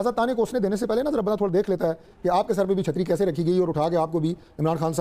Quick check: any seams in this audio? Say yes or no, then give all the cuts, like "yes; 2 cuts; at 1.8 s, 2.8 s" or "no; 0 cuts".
no; 0 cuts